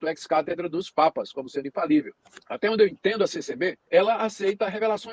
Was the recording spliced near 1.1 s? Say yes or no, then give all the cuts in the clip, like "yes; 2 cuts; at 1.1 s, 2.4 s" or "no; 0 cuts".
no; 2 cuts; at 2.5 s, 3.8 s